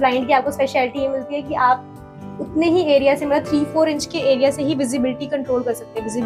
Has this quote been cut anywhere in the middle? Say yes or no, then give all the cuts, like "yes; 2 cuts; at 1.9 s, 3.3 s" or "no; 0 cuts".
no; 0 cuts